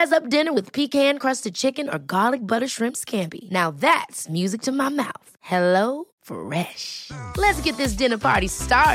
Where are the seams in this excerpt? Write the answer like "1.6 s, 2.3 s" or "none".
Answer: none